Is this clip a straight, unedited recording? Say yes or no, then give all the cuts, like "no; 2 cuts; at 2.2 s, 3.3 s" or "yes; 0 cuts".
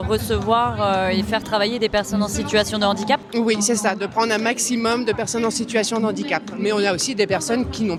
yes; 0 cuts